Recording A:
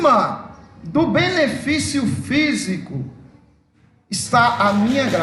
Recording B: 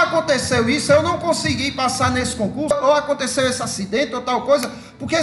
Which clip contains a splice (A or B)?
B